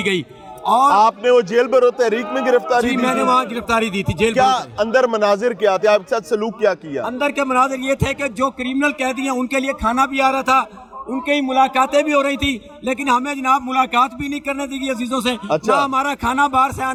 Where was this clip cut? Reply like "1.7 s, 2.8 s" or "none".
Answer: none